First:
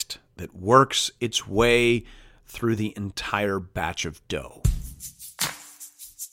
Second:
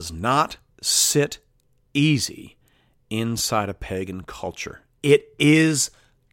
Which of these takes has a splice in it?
first; 1 cut; at 4.6 s

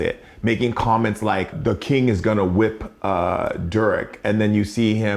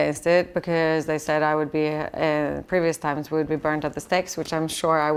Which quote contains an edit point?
first; 1 cut; at 1.5 s

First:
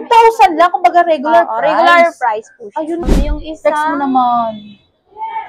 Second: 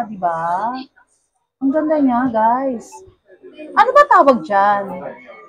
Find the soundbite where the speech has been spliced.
first; 1 cut; at 3.0 s

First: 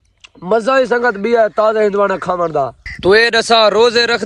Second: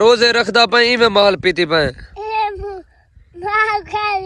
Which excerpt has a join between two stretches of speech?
first; 1 cut; at 2.8 s

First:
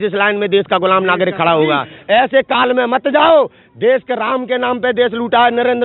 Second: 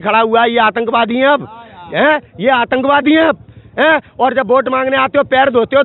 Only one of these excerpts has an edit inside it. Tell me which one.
first; 1 cut; at 1.9 s

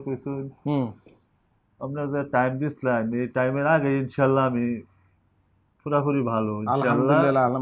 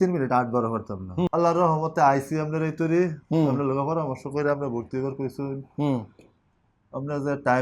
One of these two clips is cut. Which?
second; 1 cut; at 1.3 s

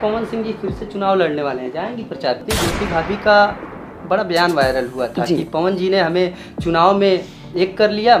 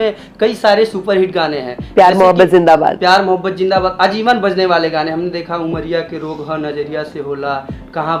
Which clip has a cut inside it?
first; 1 cut; at 2.4 s

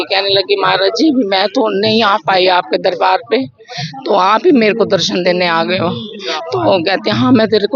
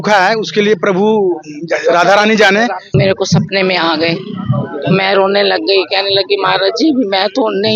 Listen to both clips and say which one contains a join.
second; 1 cut; at 2.9 s

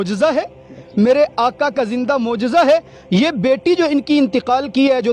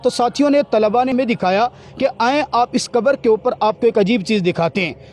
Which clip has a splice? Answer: second; 1 cut; at 1.1 s

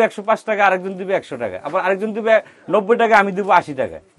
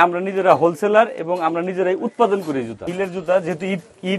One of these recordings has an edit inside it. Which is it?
second; 1 cut; at 2.9 s

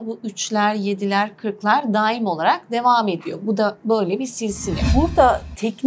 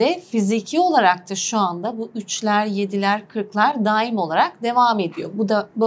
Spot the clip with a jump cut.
first; 1 cut; at 4.9 s

